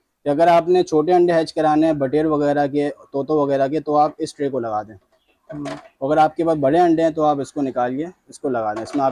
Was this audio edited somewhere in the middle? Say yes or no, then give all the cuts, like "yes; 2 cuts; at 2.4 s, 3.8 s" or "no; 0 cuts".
no; 0 cuts